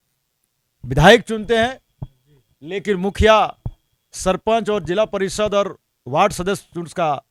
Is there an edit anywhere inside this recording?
no; 0 cuts

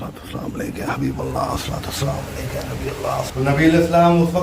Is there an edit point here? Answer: yes; 1 cut; at 3.3 s

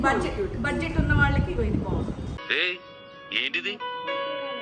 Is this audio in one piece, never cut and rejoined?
yes; 0 cuts

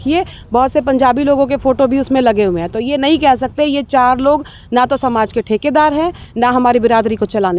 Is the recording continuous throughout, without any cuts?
yes; 0 cuts

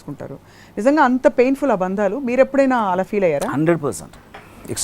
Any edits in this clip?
no; 0 cuts

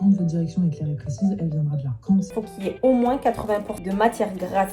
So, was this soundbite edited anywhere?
yes; 1 cut; at 2.3 s

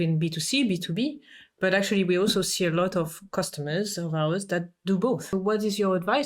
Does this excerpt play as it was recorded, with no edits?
no; 1 cut; at 5.3 s

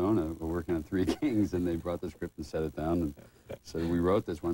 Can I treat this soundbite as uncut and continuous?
yes; 0 cuts

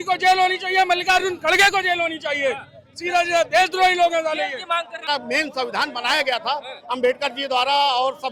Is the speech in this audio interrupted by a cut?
yes; 1 cut; at 5.1 s

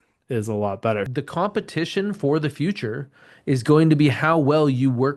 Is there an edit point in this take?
yes; 1 cut; at 1.1 s

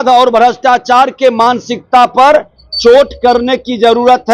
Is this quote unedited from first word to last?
yes; 0 cuts

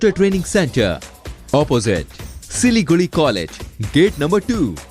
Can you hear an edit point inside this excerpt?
no; 0 cuts

